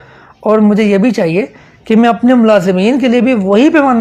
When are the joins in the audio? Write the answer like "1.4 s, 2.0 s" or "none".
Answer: none